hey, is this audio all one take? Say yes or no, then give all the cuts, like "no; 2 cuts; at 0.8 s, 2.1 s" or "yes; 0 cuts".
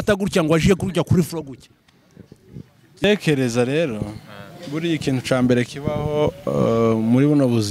no; 1 cut; at 3.0 s